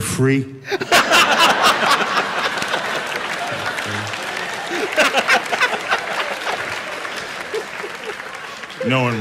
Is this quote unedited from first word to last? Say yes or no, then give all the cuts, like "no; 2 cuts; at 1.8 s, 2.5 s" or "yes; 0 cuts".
yes; 0 cuts